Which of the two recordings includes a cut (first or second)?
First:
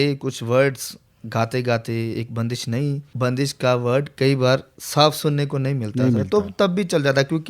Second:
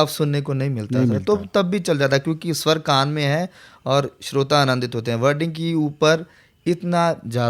first